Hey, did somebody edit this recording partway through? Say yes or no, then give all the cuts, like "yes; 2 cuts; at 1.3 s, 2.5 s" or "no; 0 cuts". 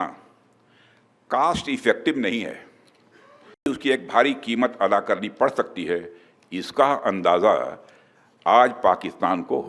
yes; 1 cut; at 3.7 s